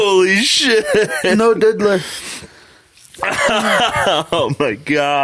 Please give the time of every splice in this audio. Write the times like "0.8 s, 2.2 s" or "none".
none

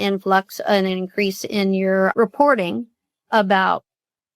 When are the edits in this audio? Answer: 2.1 s

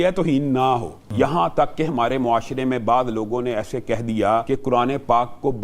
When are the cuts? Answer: 1.0 s, 4.4 s

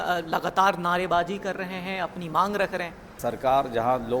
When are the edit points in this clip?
3.0 s

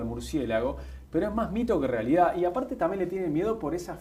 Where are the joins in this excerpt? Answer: none

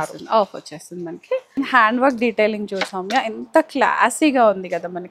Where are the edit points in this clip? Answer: 1.6 s

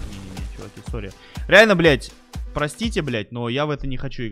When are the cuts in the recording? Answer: none

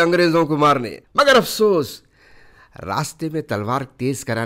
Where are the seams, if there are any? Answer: 1.0 s

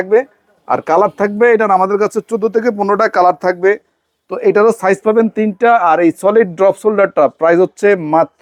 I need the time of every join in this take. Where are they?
none

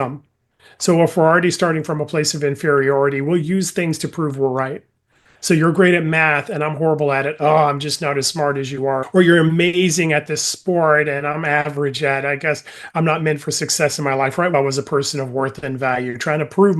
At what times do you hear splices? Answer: 14.5 s

